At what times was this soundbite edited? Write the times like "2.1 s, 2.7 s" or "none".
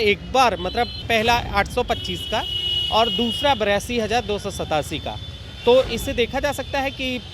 1.0 s